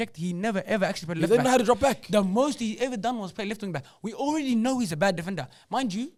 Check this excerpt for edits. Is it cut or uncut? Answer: uncut